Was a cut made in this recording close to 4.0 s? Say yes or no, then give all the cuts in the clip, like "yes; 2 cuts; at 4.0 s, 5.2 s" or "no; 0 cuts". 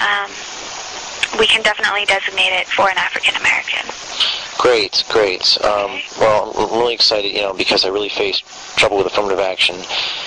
yes; 1 cut; at 4.0 s